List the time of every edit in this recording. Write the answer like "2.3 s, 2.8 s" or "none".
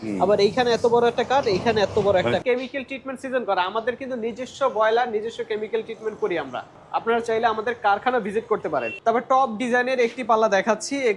2.4 s, 6.8 s, 8.9 s